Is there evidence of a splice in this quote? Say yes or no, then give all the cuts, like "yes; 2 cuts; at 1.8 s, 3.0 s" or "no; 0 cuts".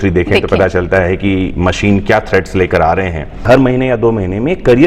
yes; 1 cut; at 3.4 s